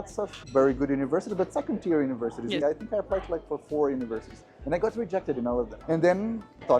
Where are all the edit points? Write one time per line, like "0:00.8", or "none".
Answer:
0:02.6
0:05.8